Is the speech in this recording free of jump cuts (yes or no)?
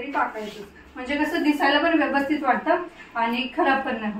yes